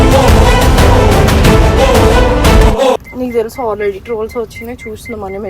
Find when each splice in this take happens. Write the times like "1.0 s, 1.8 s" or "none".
3.1 s